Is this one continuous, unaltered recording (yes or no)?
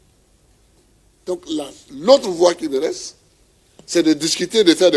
yes